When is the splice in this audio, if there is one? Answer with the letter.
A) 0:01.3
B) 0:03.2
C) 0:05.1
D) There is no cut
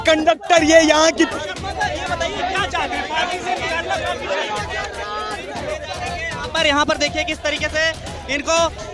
A